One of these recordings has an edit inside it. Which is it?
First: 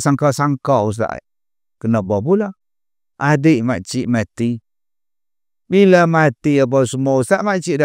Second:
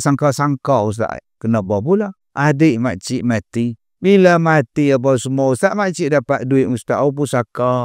second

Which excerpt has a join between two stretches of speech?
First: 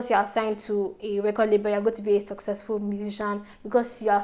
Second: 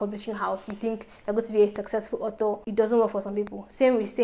second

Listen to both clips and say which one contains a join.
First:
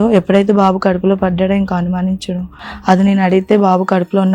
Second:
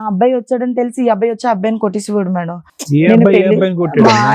first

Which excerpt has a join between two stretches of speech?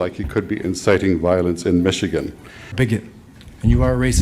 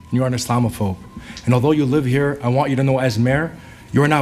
first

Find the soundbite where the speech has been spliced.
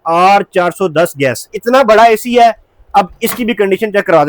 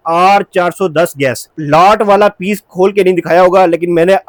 first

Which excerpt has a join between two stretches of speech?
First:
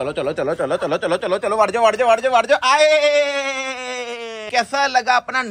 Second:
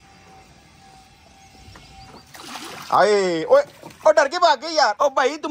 first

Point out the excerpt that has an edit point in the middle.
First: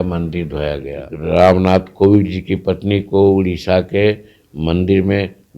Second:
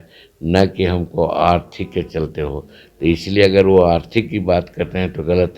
first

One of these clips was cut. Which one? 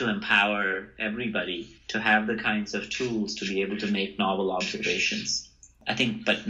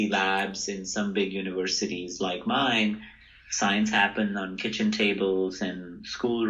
first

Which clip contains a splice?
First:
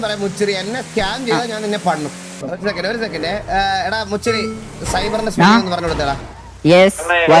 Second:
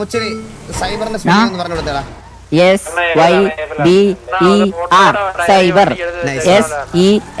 first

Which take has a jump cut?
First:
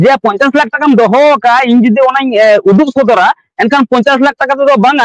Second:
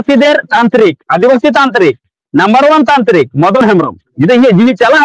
second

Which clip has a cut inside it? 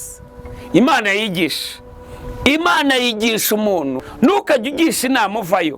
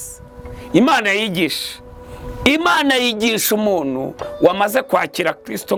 first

